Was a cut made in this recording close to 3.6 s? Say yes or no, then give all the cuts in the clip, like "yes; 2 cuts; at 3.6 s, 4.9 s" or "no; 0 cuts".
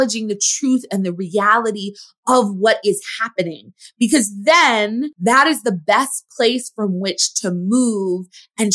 no; 1 cut; at 5.1 s